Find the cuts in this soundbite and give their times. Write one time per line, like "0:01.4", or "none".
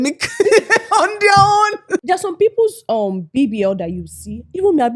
0:02.0